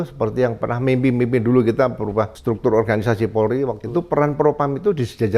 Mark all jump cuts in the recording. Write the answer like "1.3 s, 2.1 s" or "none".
2.4 s, 3.8 s